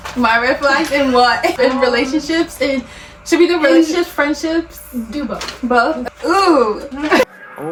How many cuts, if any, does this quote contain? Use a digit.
0